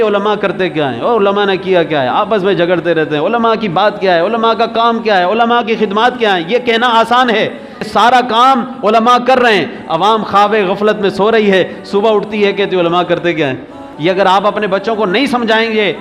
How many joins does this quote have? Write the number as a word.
two